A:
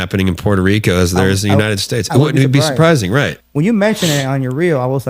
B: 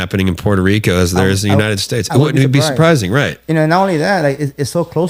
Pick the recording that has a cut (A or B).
A